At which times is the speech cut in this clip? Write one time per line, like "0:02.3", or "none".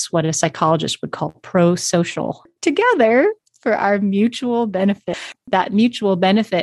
0:02.5
0:05.4

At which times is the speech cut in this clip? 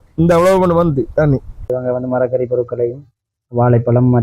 0:01.5

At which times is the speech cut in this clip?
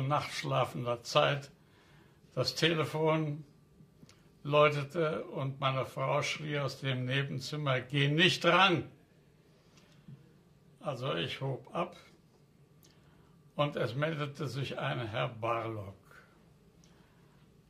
none

